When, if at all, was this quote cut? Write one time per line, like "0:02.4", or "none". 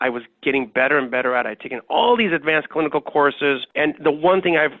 0:03.7